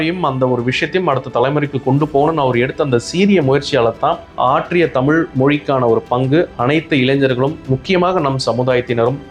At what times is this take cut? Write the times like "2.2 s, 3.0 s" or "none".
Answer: 4.3 s